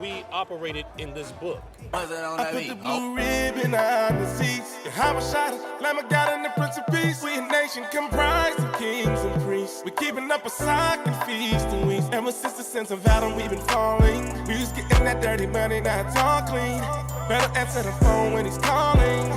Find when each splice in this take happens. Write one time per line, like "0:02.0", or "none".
0:01.8